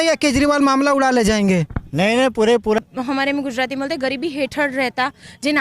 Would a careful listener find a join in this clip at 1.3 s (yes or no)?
no